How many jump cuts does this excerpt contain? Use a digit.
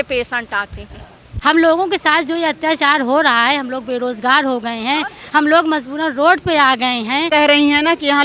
2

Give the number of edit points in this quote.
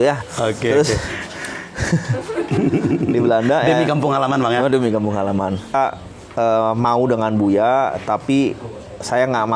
1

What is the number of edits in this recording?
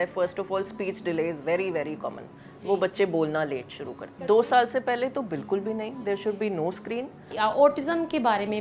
2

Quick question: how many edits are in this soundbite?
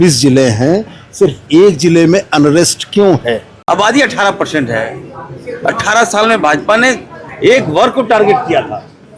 1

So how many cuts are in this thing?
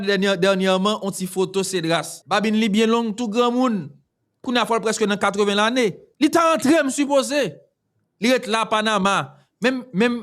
2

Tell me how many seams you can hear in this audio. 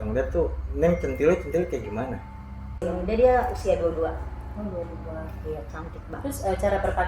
1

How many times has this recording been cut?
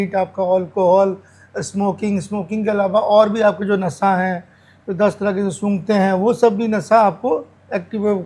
0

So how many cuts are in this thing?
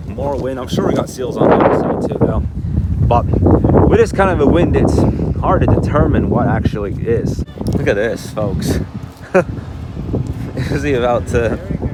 0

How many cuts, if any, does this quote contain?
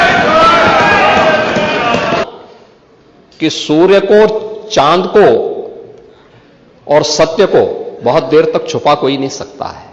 1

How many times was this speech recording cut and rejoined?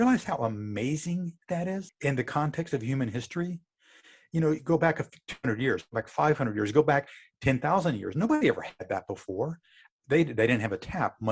1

